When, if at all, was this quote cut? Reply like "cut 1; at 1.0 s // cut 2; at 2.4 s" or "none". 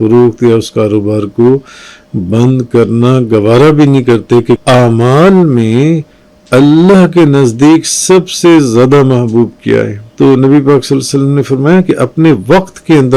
cut 1; at 4.6 s // cut 2; at 10.0 s